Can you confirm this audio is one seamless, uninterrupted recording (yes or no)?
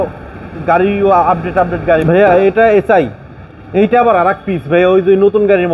no